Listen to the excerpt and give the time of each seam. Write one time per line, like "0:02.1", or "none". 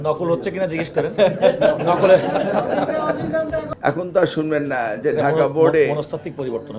0:03.7